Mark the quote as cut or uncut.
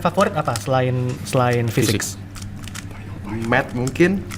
cut